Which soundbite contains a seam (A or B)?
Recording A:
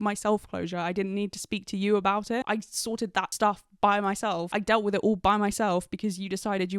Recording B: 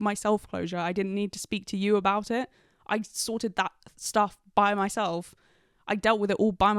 A